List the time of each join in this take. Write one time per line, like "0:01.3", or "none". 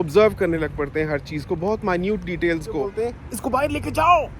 0:02.9